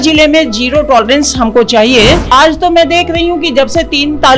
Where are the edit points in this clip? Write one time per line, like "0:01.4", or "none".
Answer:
0:02.3